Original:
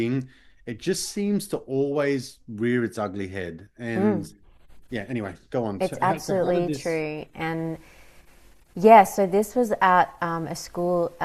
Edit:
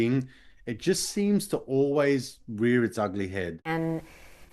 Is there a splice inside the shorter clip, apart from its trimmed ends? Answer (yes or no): yes